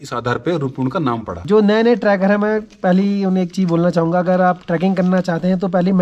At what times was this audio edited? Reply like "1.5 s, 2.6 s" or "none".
1.4 s